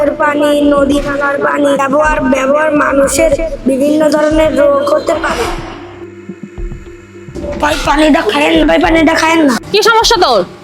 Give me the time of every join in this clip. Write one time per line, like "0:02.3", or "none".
0:09.6

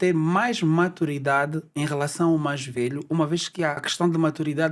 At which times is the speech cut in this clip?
none

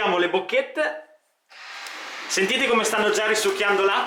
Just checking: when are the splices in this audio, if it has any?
none

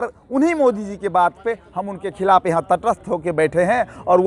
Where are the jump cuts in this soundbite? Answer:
none

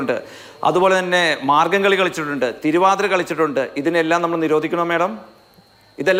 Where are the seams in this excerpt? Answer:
none

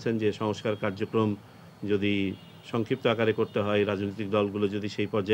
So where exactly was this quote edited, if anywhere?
none

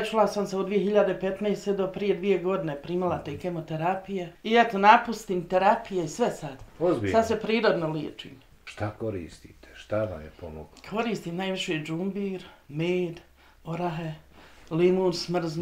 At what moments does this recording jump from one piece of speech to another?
0:04.3
0:08.6

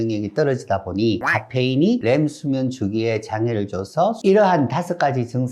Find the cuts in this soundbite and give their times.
0:02.0
0:04.2

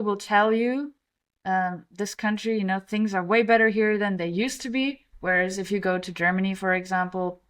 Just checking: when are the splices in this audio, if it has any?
0:05.1

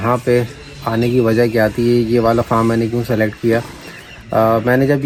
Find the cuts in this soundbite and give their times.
none

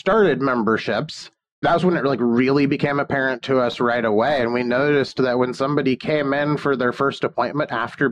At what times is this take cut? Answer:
none

